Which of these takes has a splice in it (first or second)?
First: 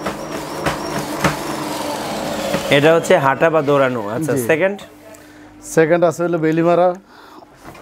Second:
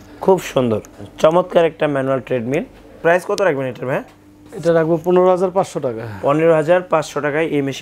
second